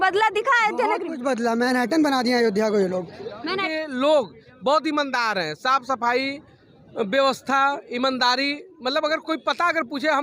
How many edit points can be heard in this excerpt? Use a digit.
1